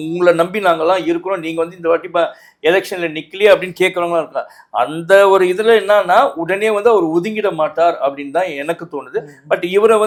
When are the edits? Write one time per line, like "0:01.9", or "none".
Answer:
none